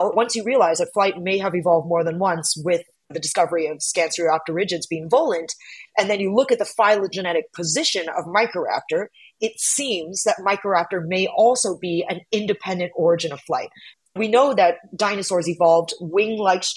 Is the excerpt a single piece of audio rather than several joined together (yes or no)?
no